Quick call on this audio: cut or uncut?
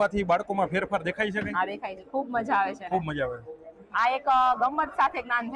uncut